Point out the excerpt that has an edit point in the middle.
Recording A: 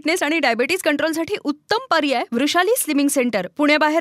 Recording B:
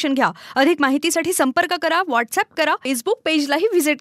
B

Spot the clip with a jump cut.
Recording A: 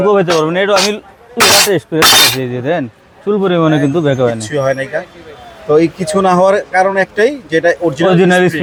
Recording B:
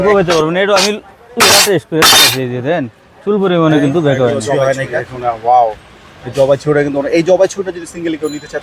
B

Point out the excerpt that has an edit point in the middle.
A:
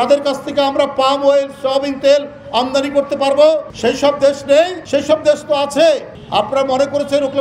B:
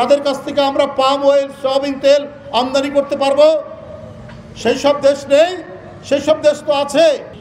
A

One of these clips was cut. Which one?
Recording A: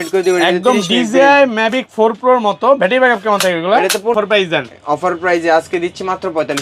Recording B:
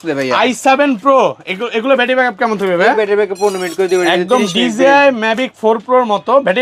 A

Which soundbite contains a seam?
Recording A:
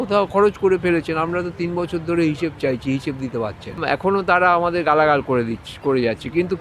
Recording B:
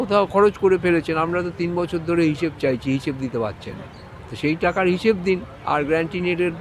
A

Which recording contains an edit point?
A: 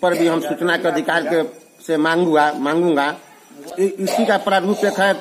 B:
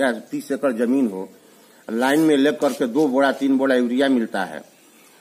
A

